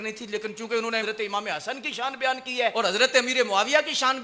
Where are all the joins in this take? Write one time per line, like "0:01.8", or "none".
0:01.0
0:02.7